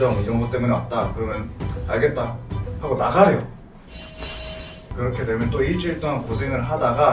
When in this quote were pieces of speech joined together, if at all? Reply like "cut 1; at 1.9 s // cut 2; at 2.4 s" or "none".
cut 1; at 4.8 s